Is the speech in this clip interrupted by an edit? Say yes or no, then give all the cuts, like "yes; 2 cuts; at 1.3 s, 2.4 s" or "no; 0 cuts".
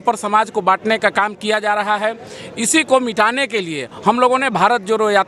no; 0 cuts